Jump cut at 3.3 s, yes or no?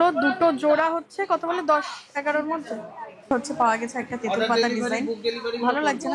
yes